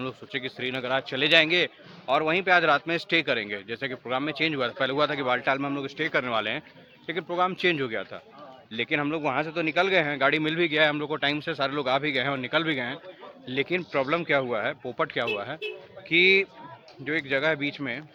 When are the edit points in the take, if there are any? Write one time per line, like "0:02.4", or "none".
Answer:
none